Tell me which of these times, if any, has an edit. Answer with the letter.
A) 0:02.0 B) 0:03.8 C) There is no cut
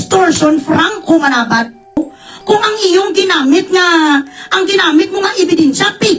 A